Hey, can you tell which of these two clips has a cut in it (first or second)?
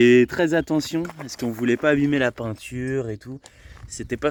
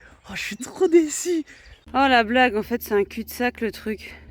second